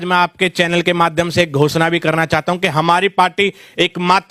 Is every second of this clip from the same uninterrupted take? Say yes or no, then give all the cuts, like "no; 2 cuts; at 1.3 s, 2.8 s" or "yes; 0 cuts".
yes; 0 cuts